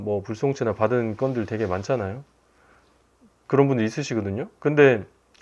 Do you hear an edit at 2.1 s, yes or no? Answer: no